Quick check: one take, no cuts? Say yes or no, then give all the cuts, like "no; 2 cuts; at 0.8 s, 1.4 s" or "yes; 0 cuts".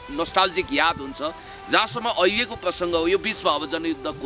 yes; 0 cuts